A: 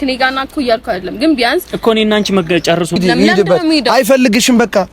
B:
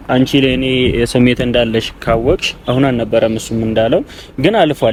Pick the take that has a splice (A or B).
A